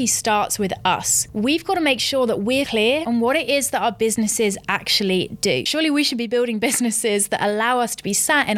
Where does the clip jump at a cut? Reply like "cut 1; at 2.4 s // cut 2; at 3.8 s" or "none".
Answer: cut 1; at 1.3 s // cut 2; at 2.7 s // cut 3; at 5.7 s

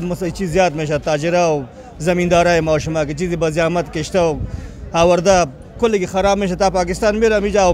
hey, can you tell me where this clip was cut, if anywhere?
none

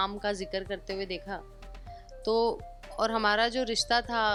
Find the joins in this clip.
none

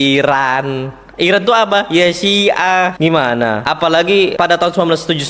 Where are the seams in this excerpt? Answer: cut 1; at 3.7 s // cut 2; at 4.3 s

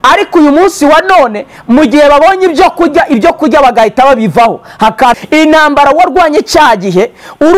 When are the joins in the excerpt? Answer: cut 1; at 5.2 s

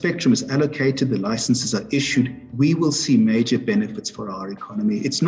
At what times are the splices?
cut 1; at 2.4 s

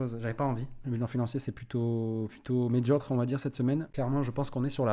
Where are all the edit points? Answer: cut 1; at 0.9 s // cut 2; at 3.9 s

